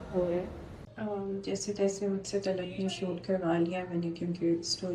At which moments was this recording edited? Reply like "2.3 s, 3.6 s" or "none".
0.9 s

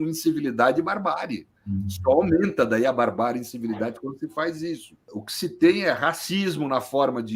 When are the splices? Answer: 5.2 s

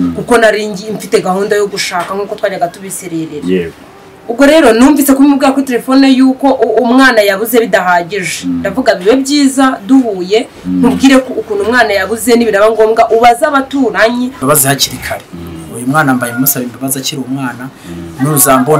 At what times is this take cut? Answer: 14.4 s

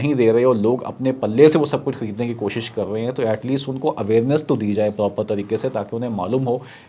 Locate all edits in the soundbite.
none

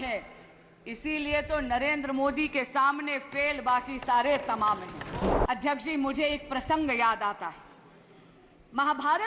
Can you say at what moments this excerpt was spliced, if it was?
5.3 s

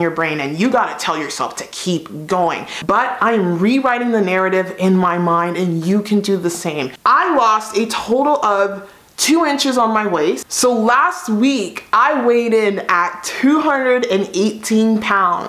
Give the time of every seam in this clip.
2.7 s, 6.9 s, 10.5 s

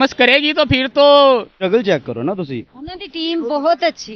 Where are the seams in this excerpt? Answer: 1.6 s

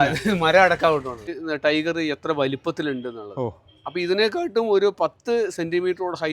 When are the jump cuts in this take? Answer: 1.4 s

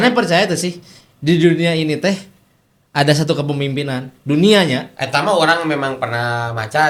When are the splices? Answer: none

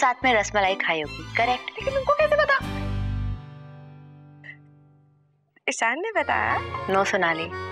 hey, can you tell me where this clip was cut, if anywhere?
1.7 s, 6.7 s

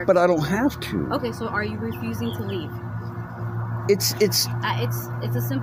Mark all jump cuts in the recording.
none

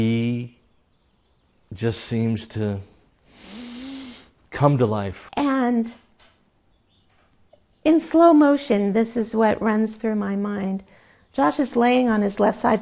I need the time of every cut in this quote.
5.2 s

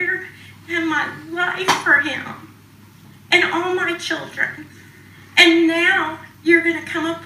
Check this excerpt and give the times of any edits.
none

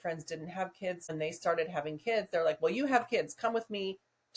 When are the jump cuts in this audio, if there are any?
1.1 s

